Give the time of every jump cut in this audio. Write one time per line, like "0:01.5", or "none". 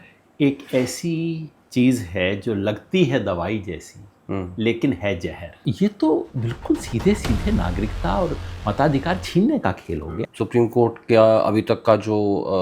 0:01.5
0:05.6
0:10.1